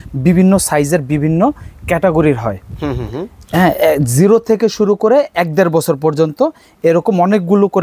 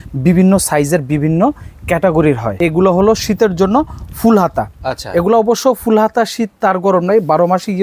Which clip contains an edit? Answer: second; 1 cut; at 2.5 s

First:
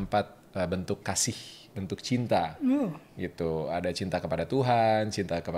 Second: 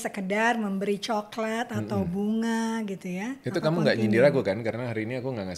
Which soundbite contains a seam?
second; 1 cut; at 3.4 s

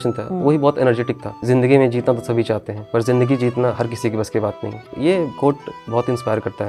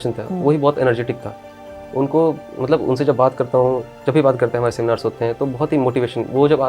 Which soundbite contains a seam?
first; 3 cuts; at 1.4 s, 2.7 s, 5.0 s

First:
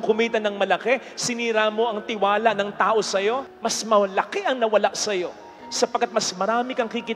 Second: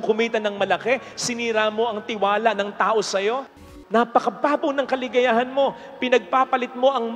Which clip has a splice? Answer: second; 1 cut; at 3.7 s

